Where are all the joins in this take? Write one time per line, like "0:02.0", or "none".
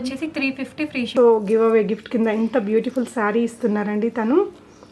0:01.1